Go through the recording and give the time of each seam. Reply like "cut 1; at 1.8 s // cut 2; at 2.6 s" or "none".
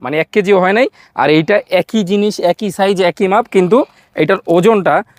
none